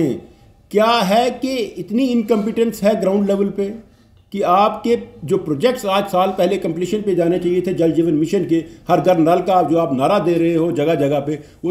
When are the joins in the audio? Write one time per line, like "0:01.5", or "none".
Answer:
none